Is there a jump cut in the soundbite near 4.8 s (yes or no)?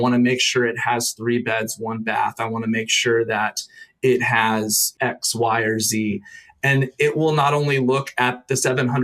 yes